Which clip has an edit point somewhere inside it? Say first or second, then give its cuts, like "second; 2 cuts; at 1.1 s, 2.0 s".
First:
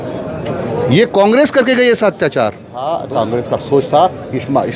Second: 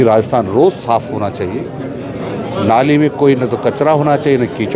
first; 1 cut; at 3.0 s